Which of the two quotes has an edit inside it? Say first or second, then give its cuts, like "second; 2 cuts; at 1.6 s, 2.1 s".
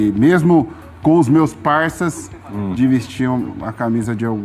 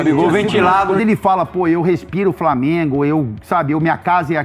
second; 1 cut; at 0.9 s